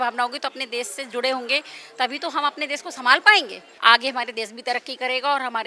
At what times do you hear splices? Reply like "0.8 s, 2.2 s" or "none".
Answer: 3.6 s